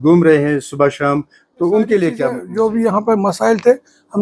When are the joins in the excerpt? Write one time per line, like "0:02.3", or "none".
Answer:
0:02.4